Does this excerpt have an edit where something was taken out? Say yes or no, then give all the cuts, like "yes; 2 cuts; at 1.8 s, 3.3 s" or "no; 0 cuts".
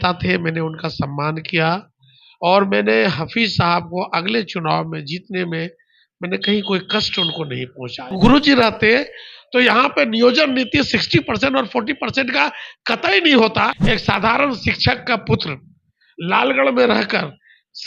yes; 2 cuts; at 8.1 s, 13.8 s